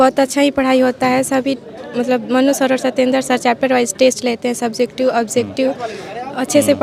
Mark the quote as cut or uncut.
uncut